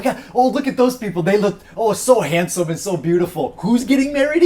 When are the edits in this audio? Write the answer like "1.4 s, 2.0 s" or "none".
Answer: none